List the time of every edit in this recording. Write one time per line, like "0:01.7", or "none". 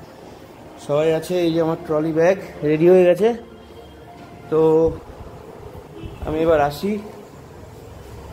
none